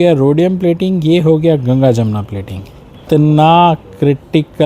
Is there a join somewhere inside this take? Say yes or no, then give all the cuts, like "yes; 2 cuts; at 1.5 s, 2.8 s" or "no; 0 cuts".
yes; 1 cut; at 3.0 s